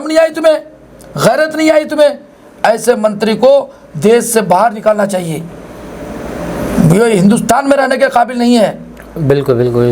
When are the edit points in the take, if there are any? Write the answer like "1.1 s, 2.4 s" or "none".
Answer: none